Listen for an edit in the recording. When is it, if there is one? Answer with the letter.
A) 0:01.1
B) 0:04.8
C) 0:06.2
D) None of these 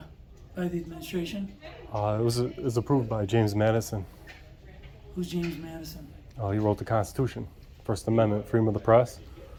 D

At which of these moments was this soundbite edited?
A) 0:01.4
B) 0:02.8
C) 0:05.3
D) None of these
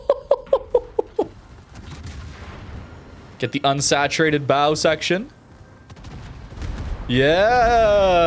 A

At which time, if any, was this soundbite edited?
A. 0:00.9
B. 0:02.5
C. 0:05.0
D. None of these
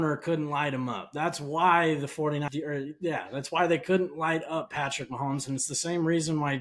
B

